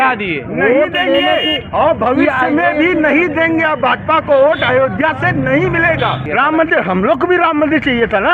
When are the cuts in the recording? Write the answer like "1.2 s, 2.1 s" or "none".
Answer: 6.2 s